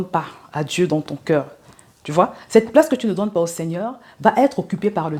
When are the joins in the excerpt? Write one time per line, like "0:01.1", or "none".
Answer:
none